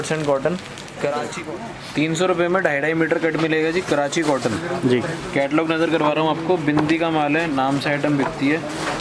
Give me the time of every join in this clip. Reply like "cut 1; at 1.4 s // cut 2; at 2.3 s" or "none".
cut 1; at 1.3 s